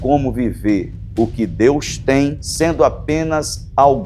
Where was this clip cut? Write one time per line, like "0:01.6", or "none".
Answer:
0:02.4